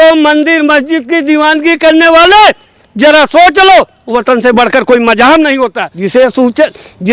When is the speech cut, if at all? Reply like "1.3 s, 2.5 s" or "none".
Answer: 5.9 s